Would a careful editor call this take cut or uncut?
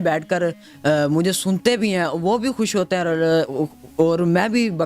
uncut